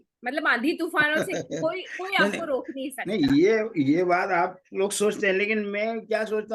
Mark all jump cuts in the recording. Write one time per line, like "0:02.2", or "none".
none